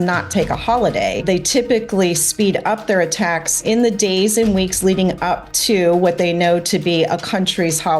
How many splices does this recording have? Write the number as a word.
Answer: two